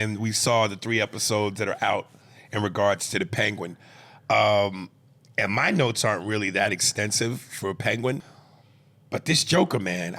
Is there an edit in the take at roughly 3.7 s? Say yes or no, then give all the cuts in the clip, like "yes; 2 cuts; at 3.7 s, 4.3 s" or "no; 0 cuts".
no; 1 cut; at 8.2 s